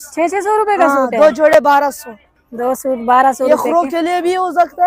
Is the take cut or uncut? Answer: uncut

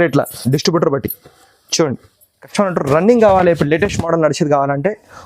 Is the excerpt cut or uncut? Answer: cut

